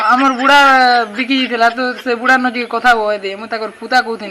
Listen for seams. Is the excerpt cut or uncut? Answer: uncut